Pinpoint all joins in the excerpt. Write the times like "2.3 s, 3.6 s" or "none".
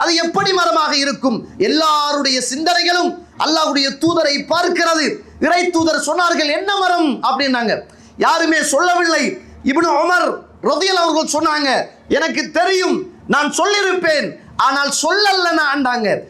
none